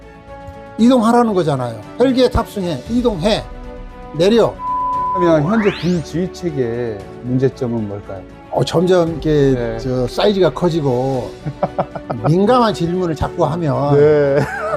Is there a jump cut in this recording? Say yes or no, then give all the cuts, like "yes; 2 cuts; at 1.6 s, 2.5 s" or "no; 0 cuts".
yes; 1 cut; at 5.2 s